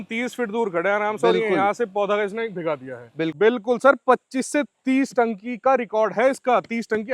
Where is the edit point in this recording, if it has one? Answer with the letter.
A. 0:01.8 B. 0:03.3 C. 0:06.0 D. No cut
B